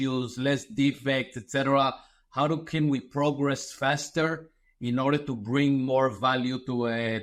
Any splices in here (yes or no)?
no